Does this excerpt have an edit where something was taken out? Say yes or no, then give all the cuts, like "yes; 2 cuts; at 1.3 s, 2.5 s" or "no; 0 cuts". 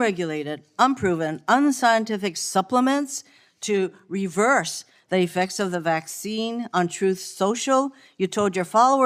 no; 0 cuts